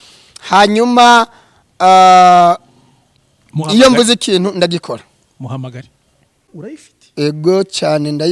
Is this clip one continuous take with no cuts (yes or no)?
no